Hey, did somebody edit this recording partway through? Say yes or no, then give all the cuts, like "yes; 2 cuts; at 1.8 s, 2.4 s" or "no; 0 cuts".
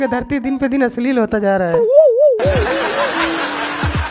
yes; 2 cuts; at 1.7 s, 2.8 s